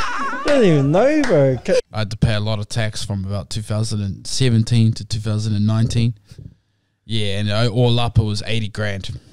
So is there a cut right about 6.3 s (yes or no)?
no